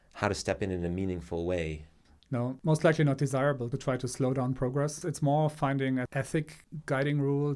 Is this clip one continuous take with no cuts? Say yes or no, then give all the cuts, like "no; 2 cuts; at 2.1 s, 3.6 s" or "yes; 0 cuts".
no; 4 cuts; at 2.6 s, 3.7 s, 5.0 s, 6.1 s